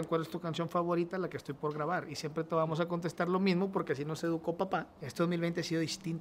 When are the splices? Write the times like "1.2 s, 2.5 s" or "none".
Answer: 5.0 s